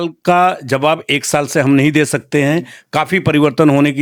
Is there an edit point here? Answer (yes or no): no